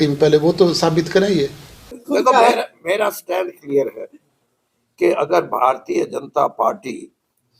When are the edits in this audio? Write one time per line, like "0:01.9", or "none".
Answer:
0:02.0